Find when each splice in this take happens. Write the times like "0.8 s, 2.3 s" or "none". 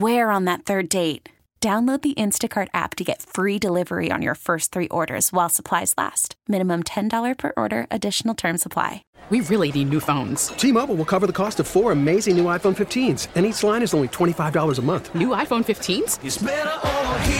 9.1 s